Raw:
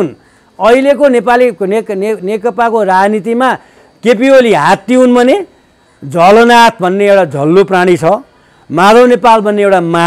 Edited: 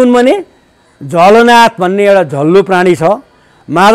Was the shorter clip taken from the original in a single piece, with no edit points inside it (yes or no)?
yes